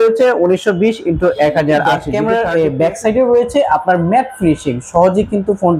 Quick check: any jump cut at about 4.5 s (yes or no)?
no